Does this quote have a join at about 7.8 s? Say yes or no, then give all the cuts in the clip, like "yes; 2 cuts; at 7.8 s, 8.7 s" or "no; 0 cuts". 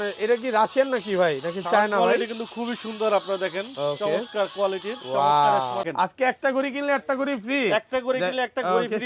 no; 1 cut; at 5.9 s